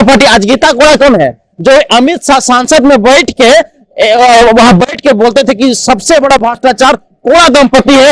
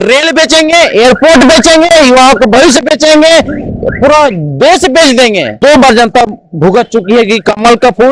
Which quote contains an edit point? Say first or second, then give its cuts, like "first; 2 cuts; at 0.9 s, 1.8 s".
second; 1 cut; at 5.5 s